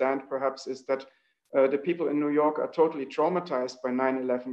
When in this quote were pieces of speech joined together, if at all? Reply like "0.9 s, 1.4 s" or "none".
none